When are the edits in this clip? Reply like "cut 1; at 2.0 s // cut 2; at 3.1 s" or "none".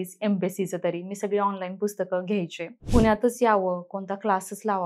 cut 1; at 2.8 s

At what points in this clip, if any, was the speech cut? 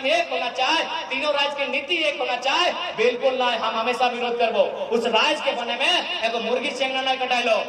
none

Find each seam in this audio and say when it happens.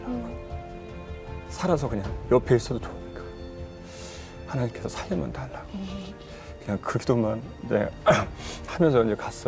none

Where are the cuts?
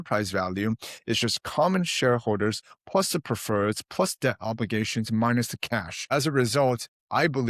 cut 1; at 6.1 s

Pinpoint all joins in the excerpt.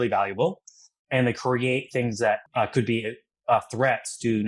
cut 1; at 2.4 s

